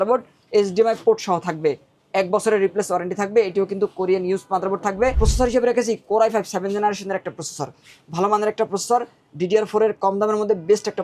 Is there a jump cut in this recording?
yes; 1 cut; at 5.2 s

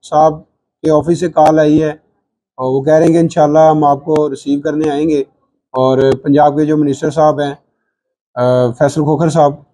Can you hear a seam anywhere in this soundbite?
no; 0 cuts

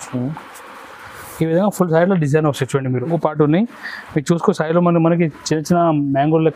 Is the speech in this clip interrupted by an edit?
yes; 1 cut; at 3.1 s

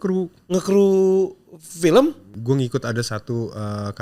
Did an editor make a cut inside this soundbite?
yes; 1 cut; at 2.4 s

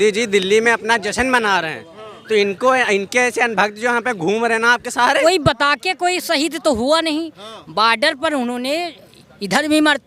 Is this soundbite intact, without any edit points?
no; 1 cut; at 5.2 s

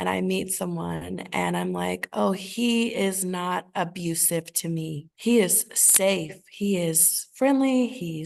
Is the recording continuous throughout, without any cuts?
yes; 0 cuts

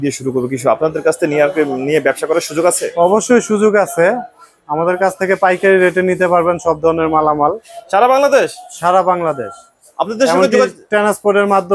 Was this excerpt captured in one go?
yes; 0 cuts

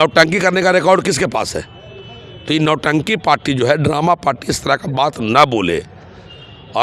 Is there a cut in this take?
no; 0 cuts

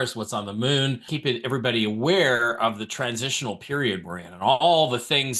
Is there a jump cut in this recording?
yes; 1 cut; at 1.0 s

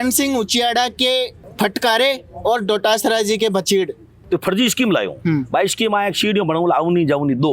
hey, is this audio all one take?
no; 2 cuts; at 1.4 s, 4.2 s

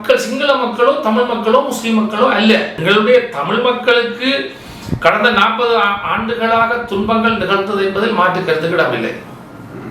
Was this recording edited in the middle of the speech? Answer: yes; 1 cut; at 2.8 s

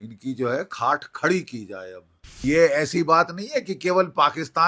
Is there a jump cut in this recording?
yes; 1 cut; at 2.4 s

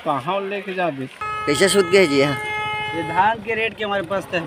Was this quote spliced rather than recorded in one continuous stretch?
yes; 1 cut; at 1.2 s

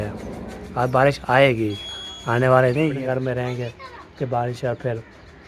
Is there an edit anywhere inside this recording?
yes; 1 cut; at 3.0 s

